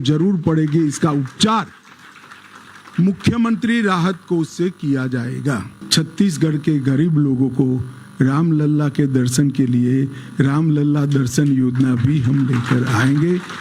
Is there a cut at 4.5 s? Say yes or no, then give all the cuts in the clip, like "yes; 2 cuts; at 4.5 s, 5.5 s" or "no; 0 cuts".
no; 1 cut; at 5.7 s